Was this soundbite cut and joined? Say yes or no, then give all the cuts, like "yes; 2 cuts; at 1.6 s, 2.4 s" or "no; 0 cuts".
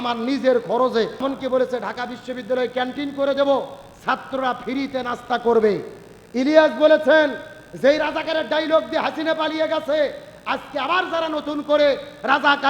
yes; 1 cut; at 1.1 s